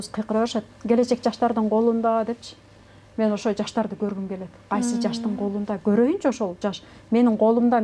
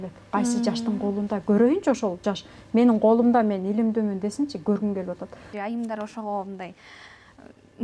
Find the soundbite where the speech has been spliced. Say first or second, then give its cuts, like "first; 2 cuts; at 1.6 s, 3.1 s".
second; 1 cut; at 5.5 s